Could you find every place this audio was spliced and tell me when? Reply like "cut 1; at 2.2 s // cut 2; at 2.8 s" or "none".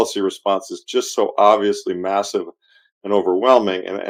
none